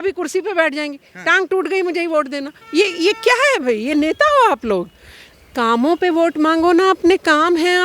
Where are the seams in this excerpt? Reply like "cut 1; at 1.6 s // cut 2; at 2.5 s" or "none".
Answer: none